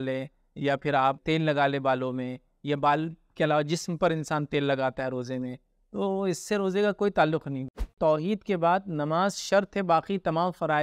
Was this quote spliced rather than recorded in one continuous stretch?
yes; 2 cuts; at 1.2 s, 7.7 s

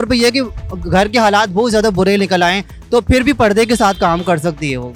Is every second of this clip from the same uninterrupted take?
yes; 0 cuts

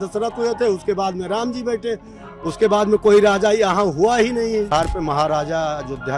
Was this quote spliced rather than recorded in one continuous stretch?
yes; 1 cut; at 4.7 s

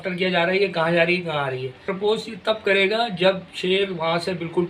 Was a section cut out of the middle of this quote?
yes; 1 cut; at 1.9 s

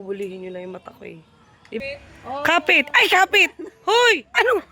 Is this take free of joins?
no; 1 cut; at 1.8 s

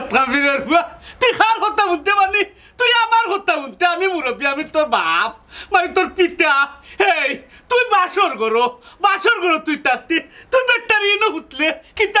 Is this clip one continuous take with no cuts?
yes; 0 cuts

